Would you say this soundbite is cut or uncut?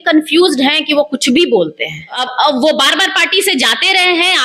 cut